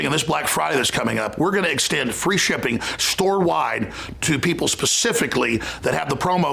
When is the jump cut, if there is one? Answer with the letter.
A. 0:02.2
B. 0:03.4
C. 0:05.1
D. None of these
D